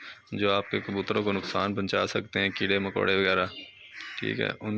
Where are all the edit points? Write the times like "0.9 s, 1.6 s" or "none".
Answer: none